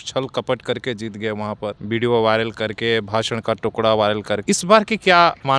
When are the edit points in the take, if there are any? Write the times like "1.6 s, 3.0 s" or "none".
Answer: 1.8 s, 4.4 s